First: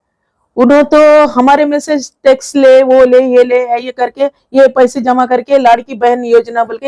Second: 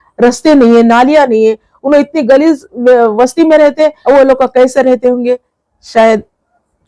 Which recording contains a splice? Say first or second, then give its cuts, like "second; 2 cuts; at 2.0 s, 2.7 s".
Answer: second; 1 cut; at 4.0 s